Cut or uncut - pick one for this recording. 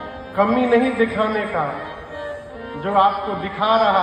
uncut